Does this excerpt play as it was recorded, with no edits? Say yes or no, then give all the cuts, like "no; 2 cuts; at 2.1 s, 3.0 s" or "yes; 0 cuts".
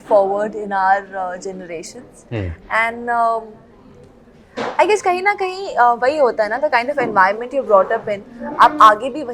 yes; 0 cuts